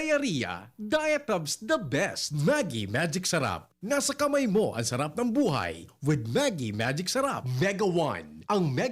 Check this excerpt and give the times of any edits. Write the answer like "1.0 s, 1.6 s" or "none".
2.3 s, 7.4 s